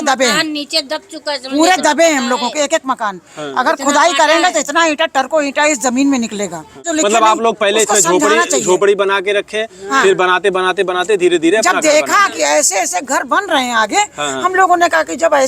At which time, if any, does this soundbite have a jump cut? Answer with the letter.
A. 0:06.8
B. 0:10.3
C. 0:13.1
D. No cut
A